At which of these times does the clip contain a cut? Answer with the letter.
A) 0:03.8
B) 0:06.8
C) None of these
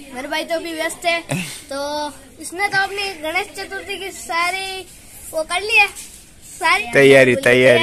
B